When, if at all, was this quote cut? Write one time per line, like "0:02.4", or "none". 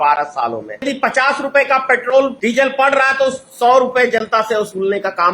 0:00.8
0:02.4